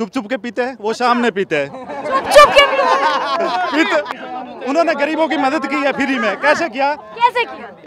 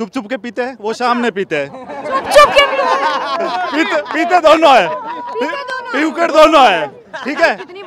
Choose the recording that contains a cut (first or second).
first